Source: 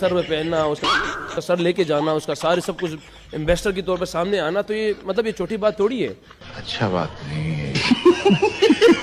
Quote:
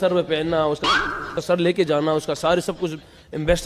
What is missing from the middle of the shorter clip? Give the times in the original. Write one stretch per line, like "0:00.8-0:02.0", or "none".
none